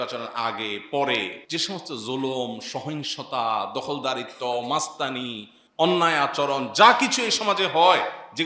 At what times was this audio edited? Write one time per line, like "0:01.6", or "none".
0:01.4